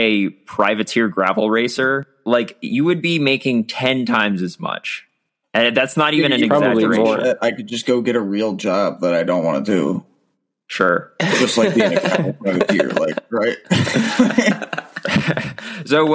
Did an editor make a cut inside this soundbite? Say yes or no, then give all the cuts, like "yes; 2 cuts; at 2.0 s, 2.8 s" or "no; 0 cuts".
yes; 1 cut; at 2.1 s